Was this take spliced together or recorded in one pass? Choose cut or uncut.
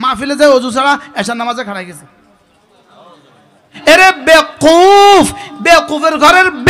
cut